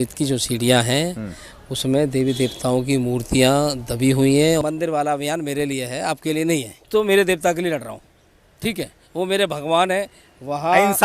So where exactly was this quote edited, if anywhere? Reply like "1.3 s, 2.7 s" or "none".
4.6 s, 6.8 s